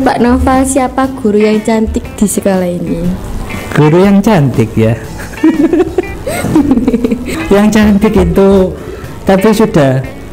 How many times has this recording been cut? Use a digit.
1